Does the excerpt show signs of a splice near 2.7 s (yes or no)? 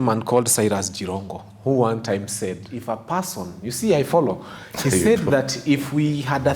yes